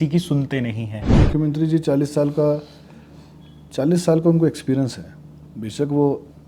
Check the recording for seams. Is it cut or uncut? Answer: cut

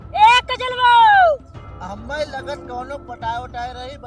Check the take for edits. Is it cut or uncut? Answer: uncut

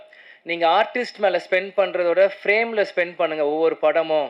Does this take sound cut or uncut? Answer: uncut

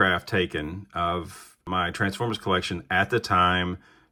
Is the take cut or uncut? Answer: uncut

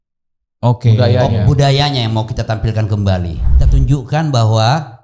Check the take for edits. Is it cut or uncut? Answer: cut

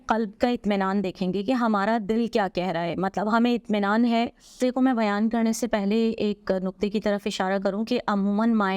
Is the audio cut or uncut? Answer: cut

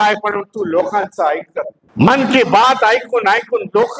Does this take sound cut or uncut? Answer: cut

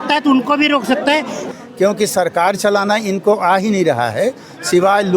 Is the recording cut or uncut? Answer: cut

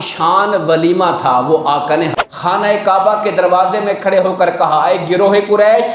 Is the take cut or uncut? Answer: cut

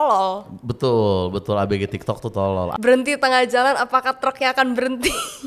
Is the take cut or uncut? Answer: cut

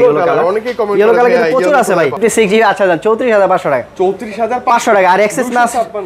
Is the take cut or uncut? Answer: cut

